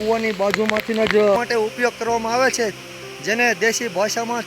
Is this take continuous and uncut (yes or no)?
no